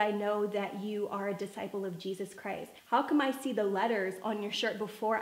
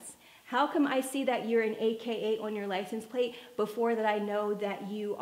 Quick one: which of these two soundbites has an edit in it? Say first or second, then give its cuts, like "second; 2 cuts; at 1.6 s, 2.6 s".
first; 1 cut; at 2.7 s